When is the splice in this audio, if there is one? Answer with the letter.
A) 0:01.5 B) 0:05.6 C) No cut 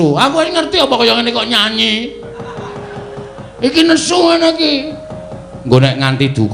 C